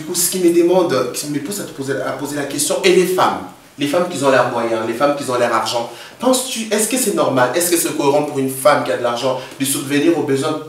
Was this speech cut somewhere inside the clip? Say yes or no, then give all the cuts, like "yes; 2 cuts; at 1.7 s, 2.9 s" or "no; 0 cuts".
no; 0 cuts